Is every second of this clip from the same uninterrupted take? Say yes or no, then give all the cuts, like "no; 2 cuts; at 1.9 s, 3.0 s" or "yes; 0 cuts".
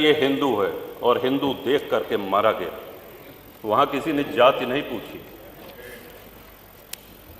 yes; 0 cuts